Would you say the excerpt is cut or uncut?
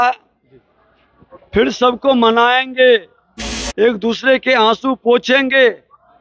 uncut